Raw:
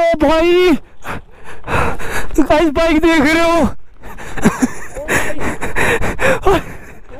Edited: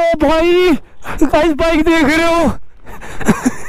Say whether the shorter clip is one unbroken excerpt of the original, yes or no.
no